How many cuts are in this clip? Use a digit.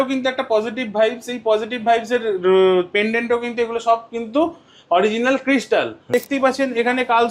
1